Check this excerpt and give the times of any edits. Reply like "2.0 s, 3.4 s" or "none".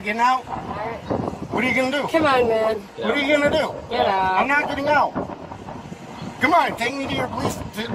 none